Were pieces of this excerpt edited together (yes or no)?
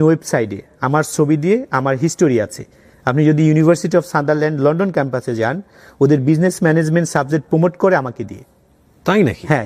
no